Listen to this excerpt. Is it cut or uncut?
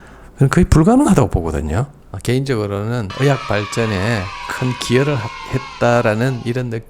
cut